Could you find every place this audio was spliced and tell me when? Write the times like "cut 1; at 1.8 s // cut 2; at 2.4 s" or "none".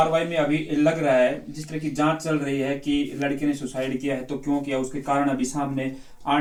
none